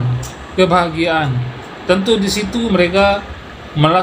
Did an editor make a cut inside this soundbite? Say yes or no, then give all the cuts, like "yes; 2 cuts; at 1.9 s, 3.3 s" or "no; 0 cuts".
no; 0 cuts